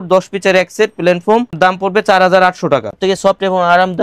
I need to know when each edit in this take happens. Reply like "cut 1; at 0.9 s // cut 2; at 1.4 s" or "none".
cut 1; at 2.9 s